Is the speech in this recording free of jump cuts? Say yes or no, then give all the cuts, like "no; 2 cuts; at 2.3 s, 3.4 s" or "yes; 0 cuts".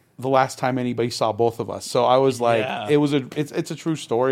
yes; 0 cuts